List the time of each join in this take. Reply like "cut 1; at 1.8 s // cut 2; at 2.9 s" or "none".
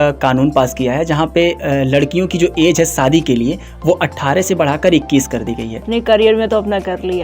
cut 1; at 5.9 s